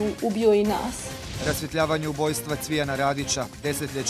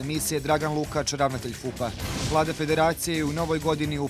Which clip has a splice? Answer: second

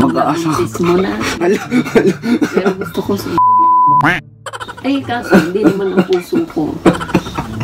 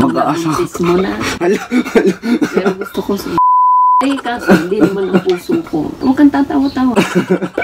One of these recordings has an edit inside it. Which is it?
second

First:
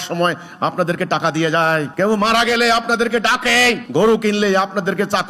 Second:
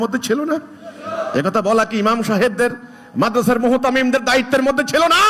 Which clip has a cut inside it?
first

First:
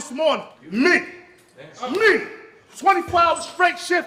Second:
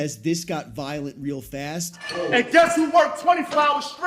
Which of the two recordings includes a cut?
second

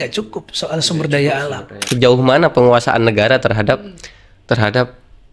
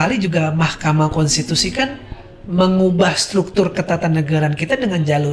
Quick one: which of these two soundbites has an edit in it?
first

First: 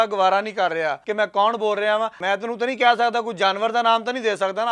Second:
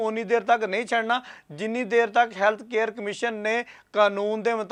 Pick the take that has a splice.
first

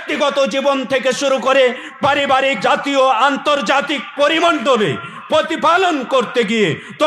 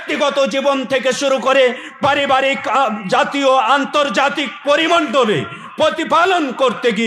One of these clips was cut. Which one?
first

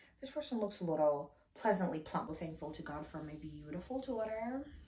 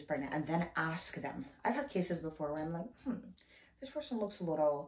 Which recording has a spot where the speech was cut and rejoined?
first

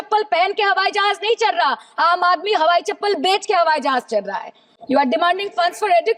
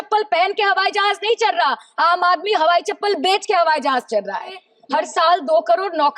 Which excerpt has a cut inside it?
second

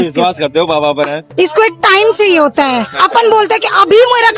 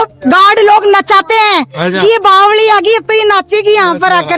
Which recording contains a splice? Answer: first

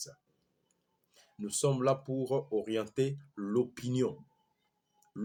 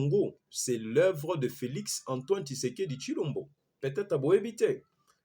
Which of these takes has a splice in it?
second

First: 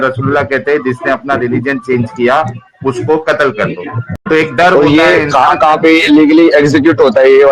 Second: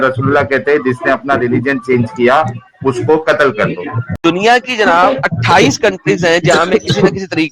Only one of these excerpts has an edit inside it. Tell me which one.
second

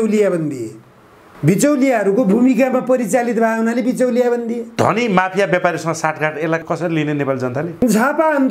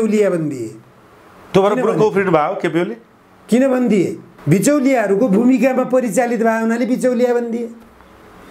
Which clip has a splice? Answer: first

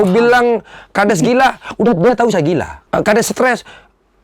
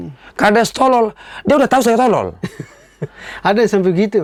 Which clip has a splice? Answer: first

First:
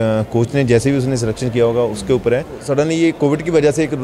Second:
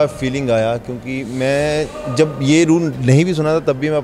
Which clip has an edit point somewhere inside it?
first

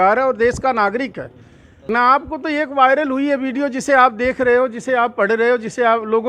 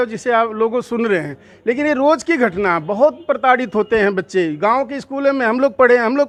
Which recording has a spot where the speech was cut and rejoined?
first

